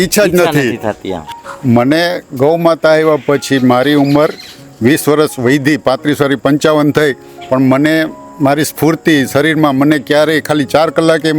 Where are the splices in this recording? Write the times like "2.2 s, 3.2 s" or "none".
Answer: 1.3 s